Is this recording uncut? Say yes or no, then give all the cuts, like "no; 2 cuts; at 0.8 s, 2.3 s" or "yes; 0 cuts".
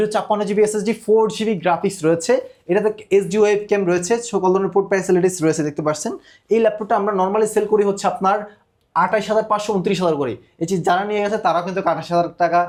yes; 0 cuts